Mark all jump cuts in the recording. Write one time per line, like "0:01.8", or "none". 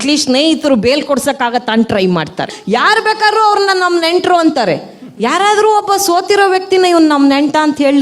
0:02.5